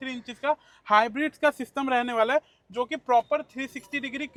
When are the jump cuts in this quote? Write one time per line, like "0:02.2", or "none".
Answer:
none